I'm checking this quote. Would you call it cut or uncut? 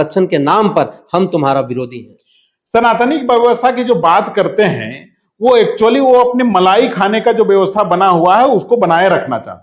uncut